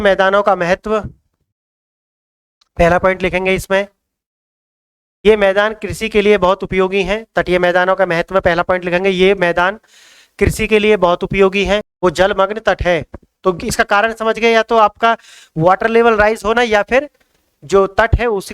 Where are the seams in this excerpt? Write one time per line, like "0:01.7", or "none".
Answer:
0:11.9